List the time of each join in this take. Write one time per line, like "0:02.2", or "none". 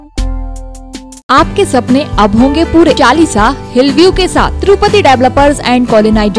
0:01.2
0:03.0